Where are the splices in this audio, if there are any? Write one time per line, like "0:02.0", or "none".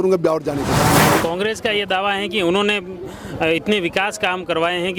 0:00.9